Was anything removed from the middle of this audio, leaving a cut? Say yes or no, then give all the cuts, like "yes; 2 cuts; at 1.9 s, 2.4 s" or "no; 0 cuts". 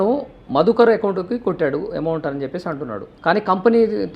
yes; 1 cut; at 3.1 s